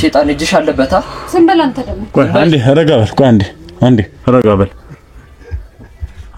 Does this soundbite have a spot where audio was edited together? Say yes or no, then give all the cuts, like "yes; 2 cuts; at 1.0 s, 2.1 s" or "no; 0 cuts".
no; 0 cuts